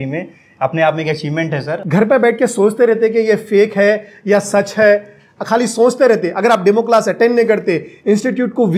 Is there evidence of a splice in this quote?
yes; 1 cut; at 1.7 s

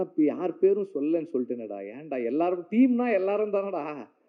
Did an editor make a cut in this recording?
no; 0 cuts

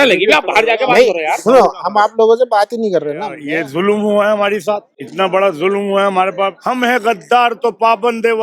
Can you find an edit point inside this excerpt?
yes; 3 cuts; at 3.4 s, 5.0 s, 6.6 s

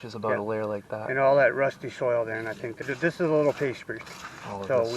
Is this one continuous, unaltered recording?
no; 1 cut; at 2.8 s

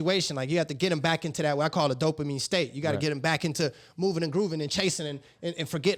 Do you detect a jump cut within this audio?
no; 0 cuts

